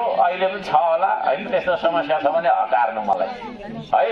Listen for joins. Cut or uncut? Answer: uncut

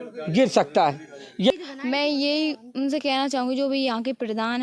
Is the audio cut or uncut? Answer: cut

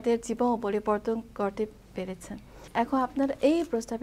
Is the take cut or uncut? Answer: cut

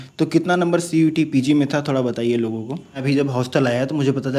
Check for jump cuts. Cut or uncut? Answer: cut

